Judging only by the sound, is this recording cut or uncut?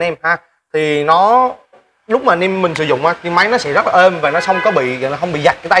uncut